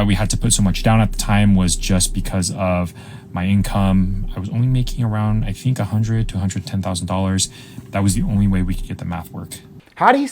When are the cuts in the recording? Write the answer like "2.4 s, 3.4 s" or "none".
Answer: none